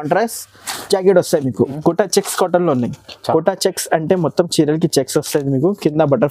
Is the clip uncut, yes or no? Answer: no